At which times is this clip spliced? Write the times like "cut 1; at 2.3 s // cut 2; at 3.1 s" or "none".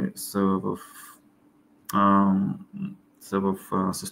none